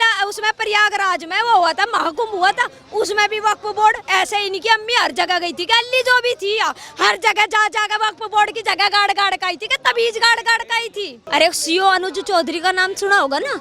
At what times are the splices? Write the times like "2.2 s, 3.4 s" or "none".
11.2 s